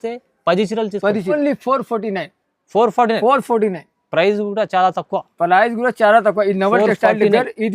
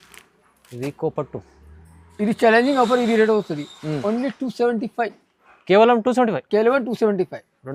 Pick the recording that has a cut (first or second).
first